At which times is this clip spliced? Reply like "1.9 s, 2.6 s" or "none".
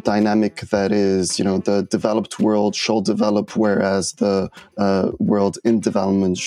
none